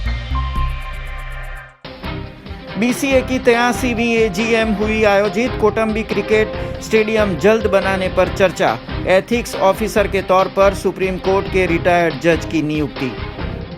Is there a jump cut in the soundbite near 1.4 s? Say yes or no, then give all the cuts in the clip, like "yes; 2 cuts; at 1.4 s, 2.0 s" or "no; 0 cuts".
yes; 1 cut; at 1.4 s